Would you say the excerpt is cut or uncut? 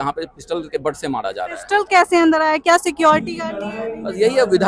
uncut